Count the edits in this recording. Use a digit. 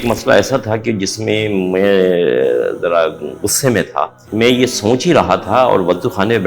1